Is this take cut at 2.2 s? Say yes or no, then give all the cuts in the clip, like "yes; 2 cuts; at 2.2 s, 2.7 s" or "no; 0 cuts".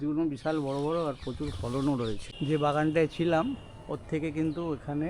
yes; 1 cut; at 2.2 s